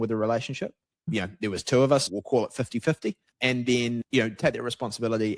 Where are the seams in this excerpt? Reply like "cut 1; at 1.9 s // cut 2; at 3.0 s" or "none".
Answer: cut 1; at 2.1 s // cut 2; at 3.3 s